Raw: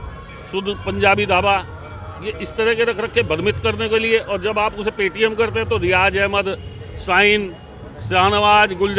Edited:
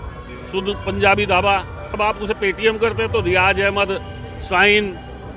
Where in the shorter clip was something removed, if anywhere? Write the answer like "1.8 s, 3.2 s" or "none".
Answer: 2.0 s